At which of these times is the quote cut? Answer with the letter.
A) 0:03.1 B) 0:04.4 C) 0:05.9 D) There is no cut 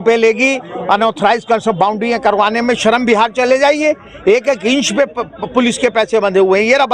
D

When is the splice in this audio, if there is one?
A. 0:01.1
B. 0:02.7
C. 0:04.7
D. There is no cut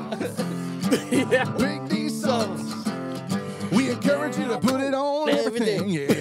D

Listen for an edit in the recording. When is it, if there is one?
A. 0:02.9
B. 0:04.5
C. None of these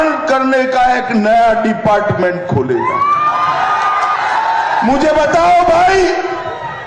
C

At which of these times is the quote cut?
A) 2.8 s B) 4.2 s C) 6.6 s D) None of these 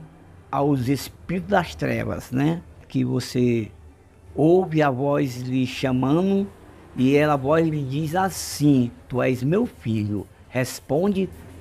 A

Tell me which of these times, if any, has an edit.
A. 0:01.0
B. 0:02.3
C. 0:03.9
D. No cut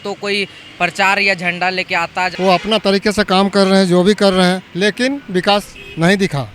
B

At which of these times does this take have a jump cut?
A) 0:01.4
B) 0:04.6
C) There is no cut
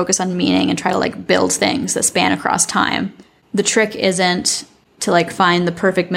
B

